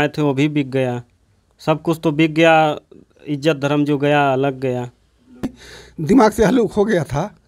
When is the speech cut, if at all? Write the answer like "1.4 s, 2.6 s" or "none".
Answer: 5.5 s